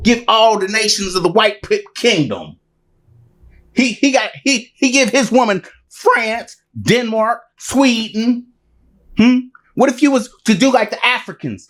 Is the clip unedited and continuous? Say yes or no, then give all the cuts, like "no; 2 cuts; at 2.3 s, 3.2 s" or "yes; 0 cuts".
yes; 0 cuts